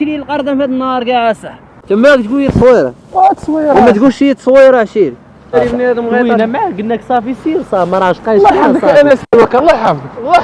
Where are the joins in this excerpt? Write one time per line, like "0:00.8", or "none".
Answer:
0:01.7
0:05.5